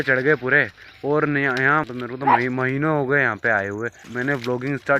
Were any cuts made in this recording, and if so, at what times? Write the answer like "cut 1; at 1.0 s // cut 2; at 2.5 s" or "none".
cut 1; at 1.8 s // cut 2; at 4.0 s